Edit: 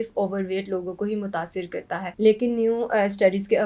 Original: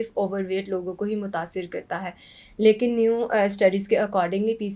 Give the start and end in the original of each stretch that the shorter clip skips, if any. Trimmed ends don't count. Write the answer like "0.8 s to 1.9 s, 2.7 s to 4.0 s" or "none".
2.1 s to 2.5 s

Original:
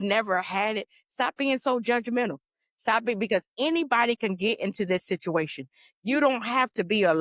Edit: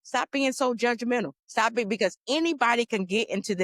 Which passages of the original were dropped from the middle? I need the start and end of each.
2.4 s to 2.7 s

